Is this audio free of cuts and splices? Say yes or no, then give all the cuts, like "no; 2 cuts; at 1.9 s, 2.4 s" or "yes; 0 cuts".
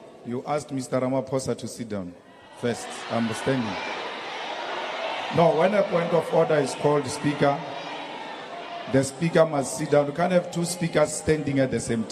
yes; 0 cuts